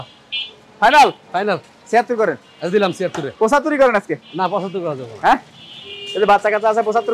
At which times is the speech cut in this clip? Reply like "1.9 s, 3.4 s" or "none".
none